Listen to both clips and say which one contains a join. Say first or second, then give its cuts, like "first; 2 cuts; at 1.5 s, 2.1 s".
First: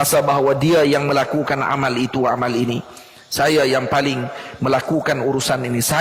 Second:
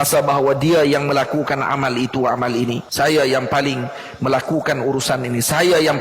second; 1 cut; at 2.8 s